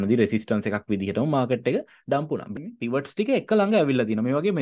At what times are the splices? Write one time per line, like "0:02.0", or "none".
0:02.5